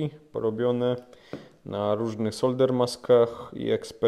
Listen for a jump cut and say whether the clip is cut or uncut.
uncut